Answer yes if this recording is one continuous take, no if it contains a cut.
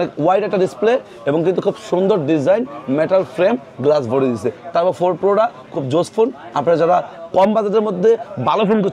yes